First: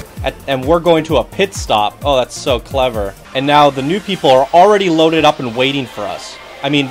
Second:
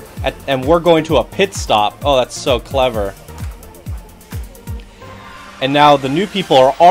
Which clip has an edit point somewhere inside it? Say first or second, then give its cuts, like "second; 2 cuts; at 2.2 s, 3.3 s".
first; 1 cut; at 3.2 s